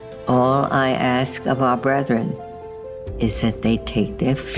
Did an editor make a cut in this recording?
no; 0 cuts

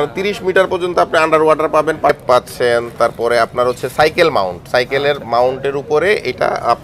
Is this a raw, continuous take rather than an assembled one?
no; 1 cut; at 2.1 s

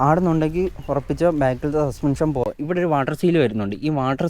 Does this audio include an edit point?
yes; 1 cut; at 2.4 s

